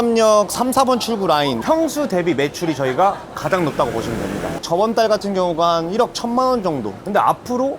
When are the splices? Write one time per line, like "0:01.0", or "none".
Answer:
0:01.6